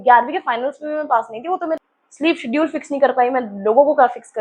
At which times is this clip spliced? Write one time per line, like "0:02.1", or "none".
0:01.9